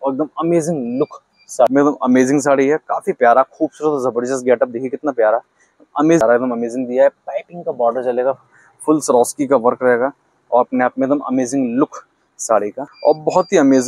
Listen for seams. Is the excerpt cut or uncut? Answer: cut